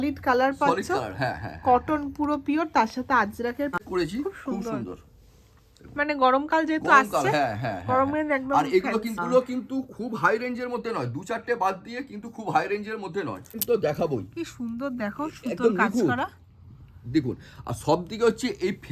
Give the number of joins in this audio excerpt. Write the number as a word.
three